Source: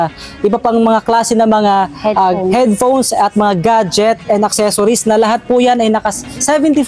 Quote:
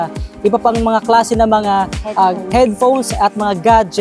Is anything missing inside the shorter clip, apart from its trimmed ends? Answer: no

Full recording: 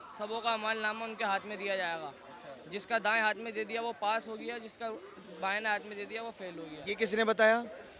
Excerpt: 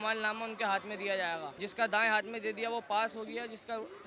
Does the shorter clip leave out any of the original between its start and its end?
yes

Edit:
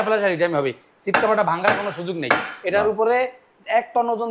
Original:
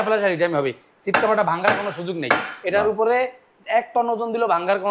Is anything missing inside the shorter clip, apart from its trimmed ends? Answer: no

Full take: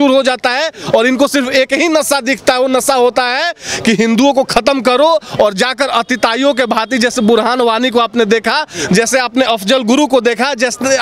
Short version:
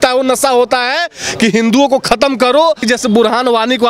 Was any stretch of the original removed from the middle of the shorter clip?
yes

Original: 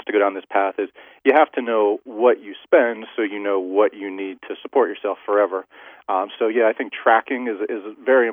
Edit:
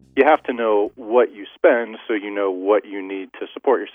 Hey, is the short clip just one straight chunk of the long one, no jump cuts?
yes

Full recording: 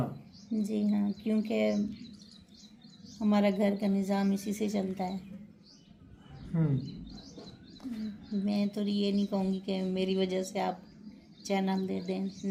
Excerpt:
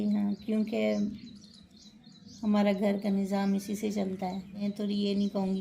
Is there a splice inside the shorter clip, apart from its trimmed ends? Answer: yes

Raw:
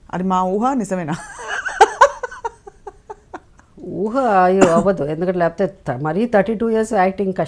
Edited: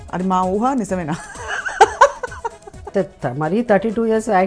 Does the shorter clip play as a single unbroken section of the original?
no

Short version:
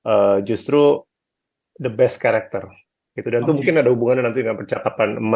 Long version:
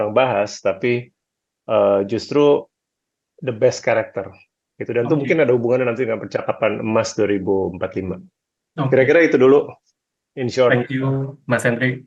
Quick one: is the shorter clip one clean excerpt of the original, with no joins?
yes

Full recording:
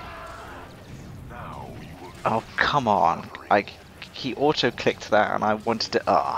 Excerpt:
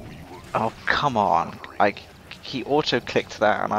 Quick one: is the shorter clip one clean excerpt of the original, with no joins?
yes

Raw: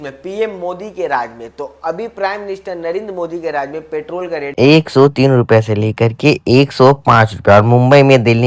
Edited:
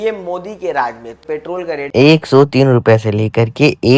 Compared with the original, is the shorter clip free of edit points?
no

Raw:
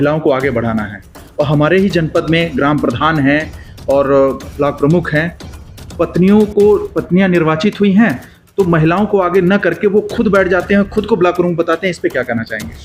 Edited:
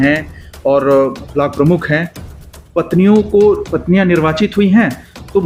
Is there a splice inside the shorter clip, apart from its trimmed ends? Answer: no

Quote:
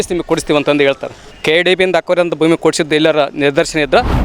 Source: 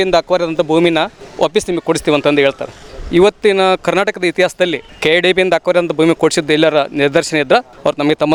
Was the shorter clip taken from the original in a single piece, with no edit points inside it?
no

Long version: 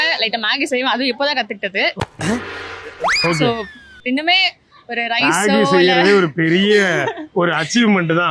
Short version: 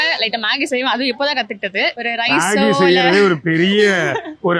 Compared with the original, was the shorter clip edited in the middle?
yes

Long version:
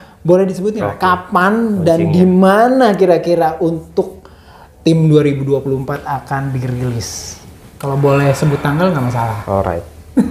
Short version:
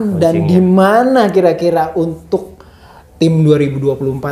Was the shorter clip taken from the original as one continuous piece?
yes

